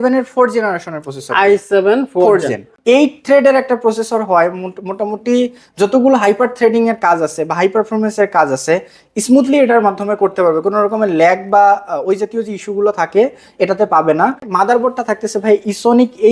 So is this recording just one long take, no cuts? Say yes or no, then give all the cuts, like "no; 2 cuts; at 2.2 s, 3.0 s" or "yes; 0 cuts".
no; 2 cuts; at 2.7 s, 14.5 s